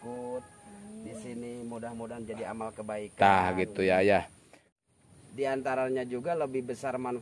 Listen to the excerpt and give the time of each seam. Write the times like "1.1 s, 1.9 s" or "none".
4.6 s